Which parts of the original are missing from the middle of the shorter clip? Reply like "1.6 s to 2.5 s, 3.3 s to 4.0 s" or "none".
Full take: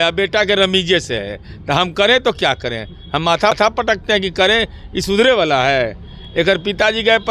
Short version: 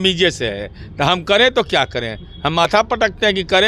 3.3 s to 3.5 s